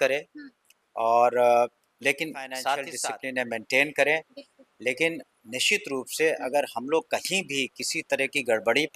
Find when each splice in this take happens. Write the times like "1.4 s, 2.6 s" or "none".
2.9 s